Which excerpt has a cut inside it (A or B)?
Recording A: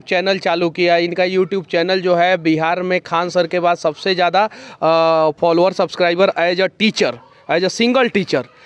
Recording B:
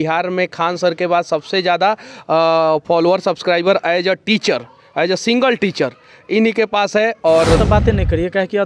B